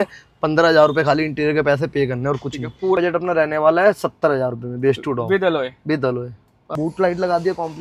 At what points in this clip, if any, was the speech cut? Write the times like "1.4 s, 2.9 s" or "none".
3.0 s, 6.6 s